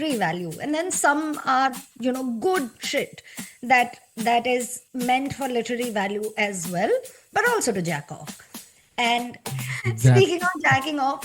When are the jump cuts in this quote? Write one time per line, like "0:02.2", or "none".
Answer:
0:09.5

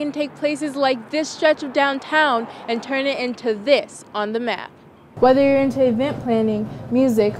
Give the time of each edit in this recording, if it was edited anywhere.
0:05.0

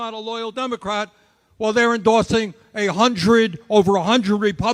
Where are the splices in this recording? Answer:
none

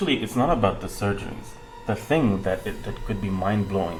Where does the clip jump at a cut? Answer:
none

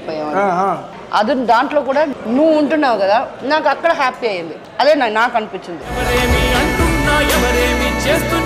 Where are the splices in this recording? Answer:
0:00.9
0:02.2
0:04.6

